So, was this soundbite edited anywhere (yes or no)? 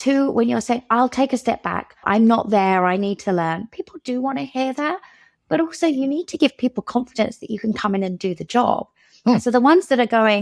yes